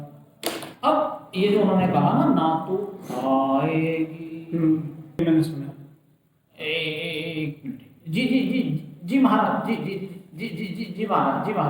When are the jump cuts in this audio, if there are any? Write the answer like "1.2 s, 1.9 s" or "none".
5.2 s